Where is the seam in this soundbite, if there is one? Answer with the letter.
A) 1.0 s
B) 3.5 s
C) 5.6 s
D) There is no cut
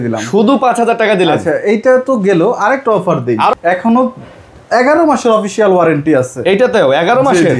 B